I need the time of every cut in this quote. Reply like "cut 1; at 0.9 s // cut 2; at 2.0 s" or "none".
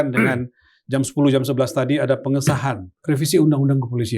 cut 1; at 2.9 s

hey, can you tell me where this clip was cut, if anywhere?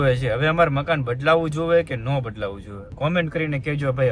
none

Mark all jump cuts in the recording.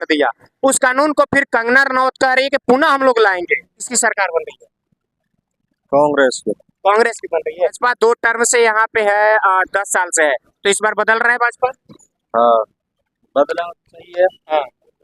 cut 1; at 3.9 s // cut 2; at 7.8 s

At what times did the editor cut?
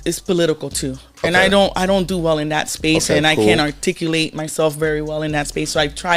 none

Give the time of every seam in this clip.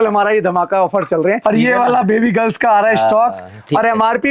cut 1; at 1.4 s

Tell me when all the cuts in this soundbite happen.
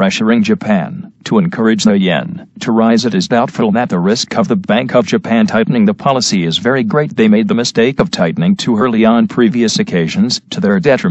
none

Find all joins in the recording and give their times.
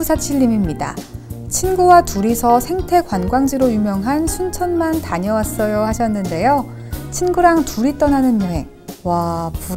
none

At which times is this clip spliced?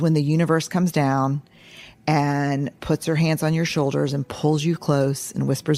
none

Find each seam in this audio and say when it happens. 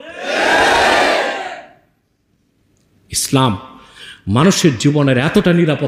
none

